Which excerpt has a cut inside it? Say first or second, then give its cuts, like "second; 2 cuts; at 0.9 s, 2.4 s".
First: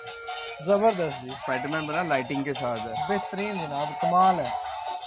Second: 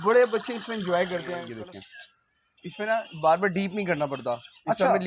second; 1 cut; at 1.5 s